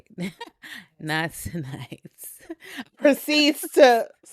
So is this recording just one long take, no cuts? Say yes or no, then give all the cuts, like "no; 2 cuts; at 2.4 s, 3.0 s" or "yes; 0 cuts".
yes; 0 cuts